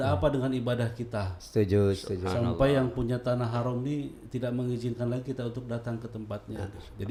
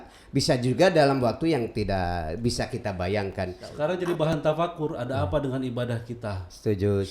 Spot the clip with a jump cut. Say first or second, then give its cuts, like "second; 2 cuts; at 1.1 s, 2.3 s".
second; 1 cut; at 3.9 s